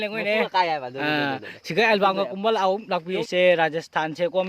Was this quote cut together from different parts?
yes; 1 cut; at 3.1 s

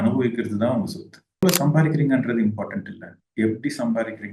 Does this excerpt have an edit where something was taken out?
yes; 1 cut; at 1.4 s

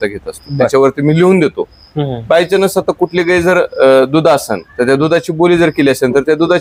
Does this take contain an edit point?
no; 0 cuts

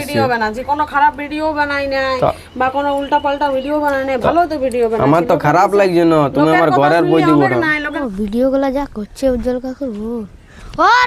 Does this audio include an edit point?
yes; 1 cut; at 8.0 s

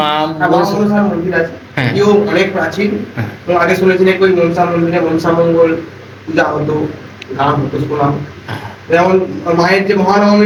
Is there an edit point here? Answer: no; 0 cuts

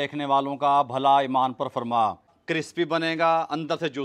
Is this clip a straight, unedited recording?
no; 1 cut; at 2.4 s

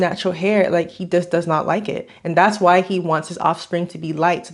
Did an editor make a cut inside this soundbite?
no; 0 cuts

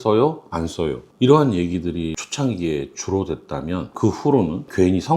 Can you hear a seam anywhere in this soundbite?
yes; 1 cut; at 3.9 s

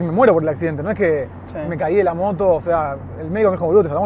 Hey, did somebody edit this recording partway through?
no; 0 cuts

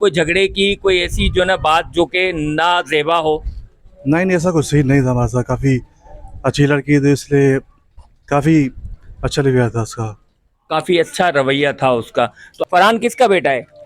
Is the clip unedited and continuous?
no; 1 cut; at 12.5 s

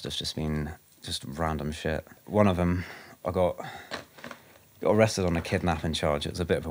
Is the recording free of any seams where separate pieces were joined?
no; 1 cut; at 2.2 s

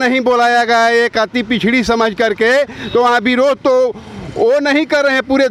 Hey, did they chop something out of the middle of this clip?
no; 0 cuts

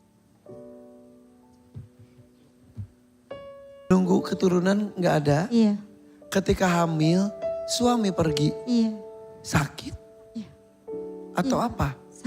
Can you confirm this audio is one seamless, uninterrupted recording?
no; 1 cut; at 3.9 s

